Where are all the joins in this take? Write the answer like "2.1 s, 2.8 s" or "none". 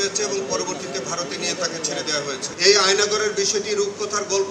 2.4 s